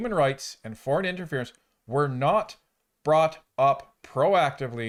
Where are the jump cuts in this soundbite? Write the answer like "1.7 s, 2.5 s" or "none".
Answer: none